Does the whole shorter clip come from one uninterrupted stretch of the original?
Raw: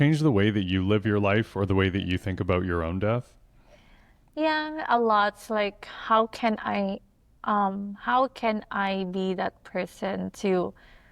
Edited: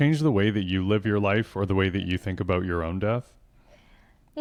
yes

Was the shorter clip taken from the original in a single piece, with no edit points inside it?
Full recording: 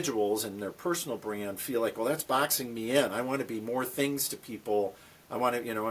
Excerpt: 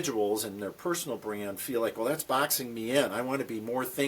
yes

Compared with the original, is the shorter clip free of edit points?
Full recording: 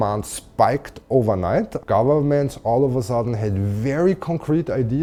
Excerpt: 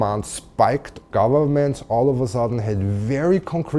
no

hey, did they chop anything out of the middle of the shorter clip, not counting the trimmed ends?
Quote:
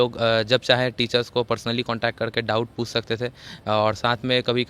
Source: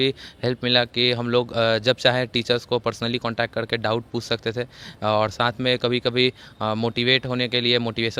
no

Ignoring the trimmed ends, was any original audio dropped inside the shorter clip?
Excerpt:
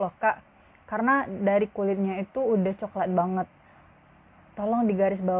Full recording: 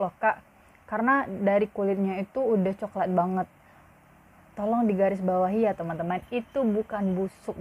no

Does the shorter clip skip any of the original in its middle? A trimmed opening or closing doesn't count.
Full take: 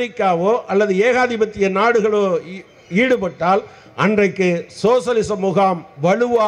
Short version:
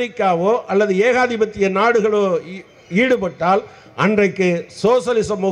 no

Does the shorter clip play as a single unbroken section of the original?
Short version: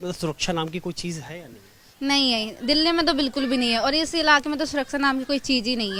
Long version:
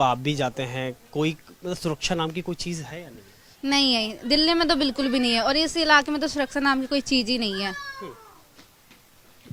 yes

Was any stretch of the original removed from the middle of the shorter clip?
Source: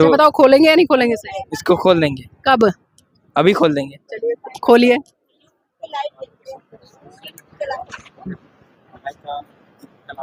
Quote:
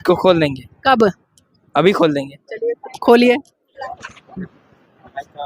yes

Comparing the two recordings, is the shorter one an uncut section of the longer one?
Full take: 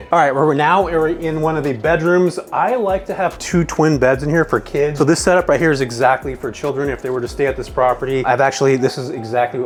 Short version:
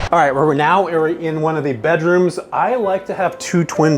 yes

